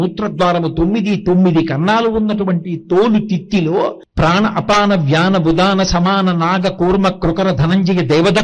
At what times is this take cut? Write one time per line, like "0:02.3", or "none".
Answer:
0:04.0

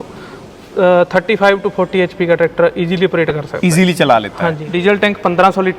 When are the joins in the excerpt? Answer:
0:04.6

